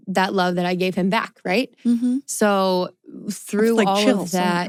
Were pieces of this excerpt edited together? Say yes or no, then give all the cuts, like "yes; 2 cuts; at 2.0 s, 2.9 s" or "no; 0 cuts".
no; 0 cuts